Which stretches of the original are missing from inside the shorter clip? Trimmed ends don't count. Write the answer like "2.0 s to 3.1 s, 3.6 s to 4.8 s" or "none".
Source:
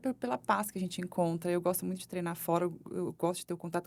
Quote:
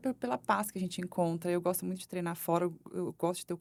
none